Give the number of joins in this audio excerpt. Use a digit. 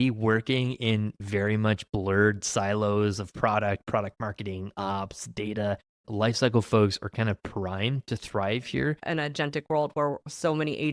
2